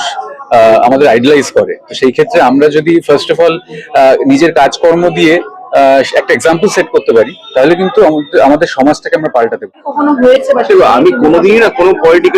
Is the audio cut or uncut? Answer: cut